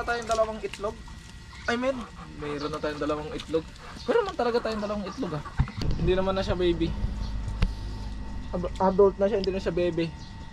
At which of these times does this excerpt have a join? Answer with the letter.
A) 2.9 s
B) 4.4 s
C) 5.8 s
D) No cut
C